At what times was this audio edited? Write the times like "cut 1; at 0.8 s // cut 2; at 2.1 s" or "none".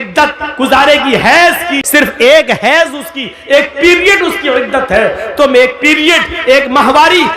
cut 1; at 1.8 s